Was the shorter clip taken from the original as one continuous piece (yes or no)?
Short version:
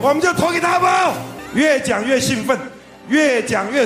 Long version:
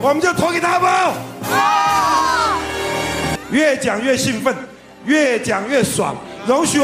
no